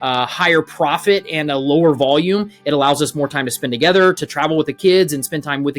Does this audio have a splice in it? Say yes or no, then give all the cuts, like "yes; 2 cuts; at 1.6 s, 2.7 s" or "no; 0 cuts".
no; 0 cuts